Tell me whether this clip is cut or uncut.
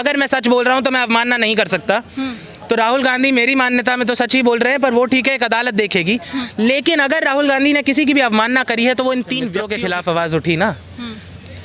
cut